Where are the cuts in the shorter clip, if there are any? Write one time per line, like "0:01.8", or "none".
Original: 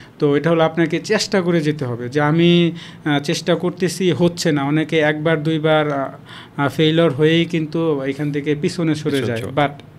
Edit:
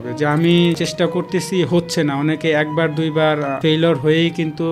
0:00.9
0:03.6